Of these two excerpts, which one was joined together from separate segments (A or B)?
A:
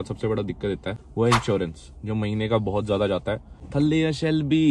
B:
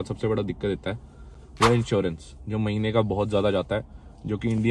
A